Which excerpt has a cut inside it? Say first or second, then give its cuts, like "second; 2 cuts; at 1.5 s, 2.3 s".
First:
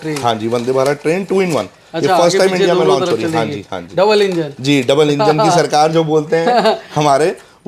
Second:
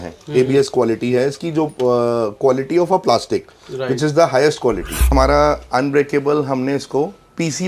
second; 1 cut; at 5.1 s